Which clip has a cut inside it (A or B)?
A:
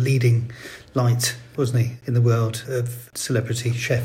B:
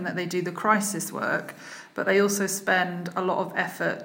A